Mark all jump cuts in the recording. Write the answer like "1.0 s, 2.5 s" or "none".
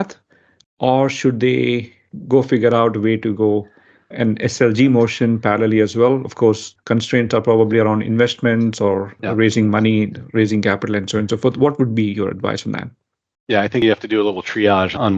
none